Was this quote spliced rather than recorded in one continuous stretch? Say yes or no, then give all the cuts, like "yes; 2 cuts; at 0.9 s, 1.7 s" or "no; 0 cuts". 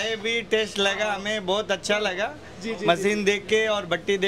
no; 0 cuts